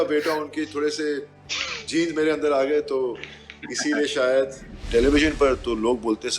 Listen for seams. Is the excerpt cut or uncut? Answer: cut